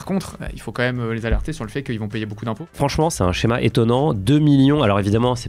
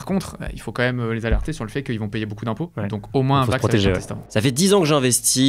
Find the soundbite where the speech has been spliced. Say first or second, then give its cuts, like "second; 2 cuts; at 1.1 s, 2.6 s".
first; 1 cut; at 2.7 s